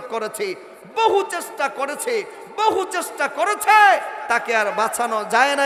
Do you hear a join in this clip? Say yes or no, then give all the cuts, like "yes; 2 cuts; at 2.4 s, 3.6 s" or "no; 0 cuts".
no; 0 cuts